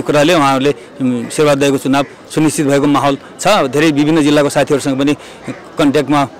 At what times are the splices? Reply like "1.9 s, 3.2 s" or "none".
none